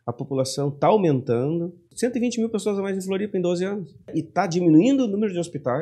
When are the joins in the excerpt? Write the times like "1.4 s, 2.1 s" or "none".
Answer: 1.9 s, 4.1 s